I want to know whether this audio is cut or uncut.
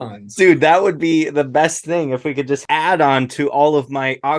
cut